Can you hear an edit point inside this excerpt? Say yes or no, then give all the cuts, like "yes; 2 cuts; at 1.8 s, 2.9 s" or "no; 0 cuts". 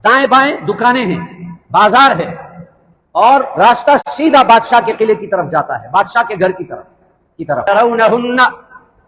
yes; 1 cut; at 7.7 s